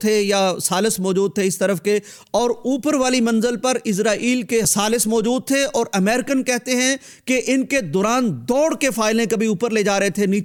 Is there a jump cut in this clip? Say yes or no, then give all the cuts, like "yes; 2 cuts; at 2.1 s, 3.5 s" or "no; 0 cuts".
no; 0 cuts